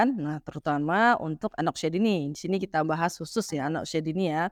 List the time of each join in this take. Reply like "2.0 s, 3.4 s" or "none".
none

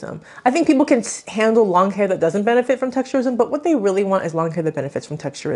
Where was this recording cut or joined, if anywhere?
none

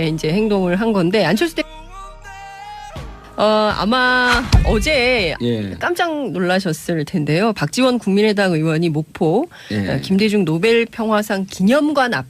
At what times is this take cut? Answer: 1.5 s

